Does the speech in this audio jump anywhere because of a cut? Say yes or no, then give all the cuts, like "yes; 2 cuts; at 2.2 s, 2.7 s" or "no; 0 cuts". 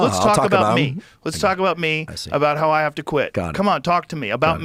no; 0 cuts